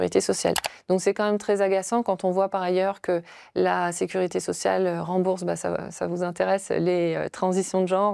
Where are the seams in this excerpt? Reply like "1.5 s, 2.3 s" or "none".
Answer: none